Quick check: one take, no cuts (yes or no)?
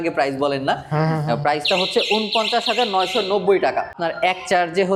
yes